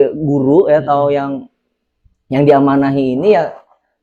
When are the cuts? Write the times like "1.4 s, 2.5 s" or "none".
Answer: none